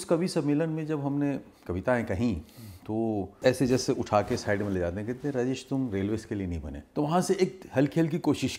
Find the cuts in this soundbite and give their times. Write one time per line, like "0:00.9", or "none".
0:03.3
0:06.8